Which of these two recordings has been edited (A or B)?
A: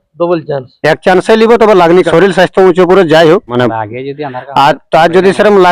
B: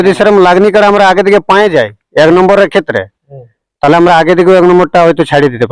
A